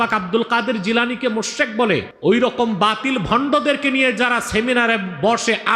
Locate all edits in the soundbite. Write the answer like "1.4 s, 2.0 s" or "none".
2.1 s